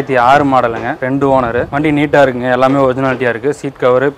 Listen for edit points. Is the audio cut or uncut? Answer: cut